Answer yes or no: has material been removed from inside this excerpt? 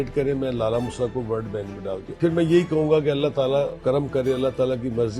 yes